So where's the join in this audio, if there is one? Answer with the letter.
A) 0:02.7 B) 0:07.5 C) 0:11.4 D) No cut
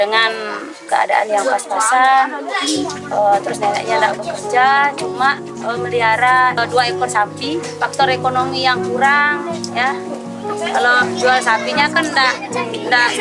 B